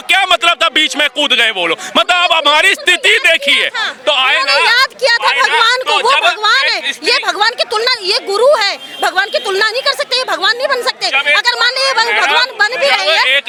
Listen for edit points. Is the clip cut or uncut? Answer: uncut